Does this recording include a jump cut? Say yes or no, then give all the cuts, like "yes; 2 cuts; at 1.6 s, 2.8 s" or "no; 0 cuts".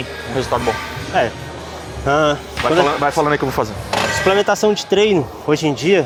no; 0 cuts